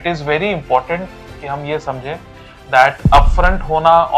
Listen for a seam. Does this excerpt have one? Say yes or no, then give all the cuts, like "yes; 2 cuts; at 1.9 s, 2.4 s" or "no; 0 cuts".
no; 0 cuts